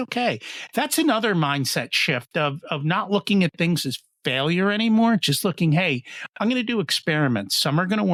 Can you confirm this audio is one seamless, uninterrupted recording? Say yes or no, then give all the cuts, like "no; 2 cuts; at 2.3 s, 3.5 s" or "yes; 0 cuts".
yes; 0 cuts